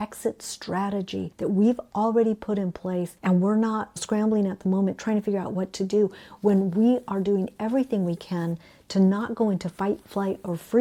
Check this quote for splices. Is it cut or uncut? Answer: uncut